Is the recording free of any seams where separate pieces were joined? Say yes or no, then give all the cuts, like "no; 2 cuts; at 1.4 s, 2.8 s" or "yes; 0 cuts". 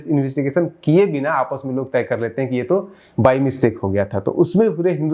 yes; 0 cuts